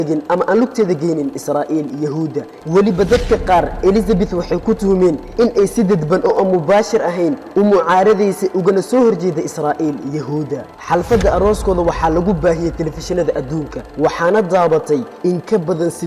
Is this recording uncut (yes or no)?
no